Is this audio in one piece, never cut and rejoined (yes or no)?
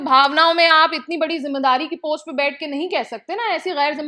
yes